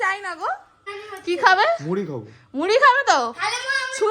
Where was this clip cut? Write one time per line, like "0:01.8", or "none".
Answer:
0:00.9